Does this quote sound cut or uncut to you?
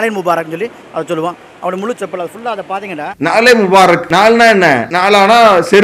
cut